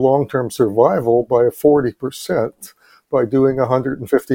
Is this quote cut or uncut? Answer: uncut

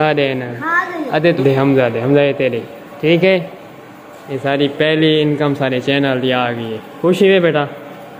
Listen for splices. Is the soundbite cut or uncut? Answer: cut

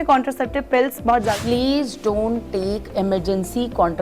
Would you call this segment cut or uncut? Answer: cut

